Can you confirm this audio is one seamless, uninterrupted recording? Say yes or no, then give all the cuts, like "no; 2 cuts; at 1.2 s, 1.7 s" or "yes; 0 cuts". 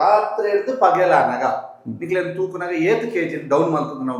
yes; 0 cuts